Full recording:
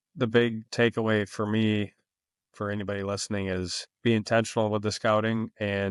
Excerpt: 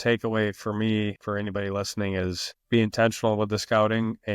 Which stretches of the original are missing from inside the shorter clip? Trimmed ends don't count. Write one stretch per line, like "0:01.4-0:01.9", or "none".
0:01.9-0:02.5